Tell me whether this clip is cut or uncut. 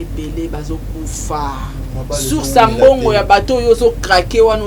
cut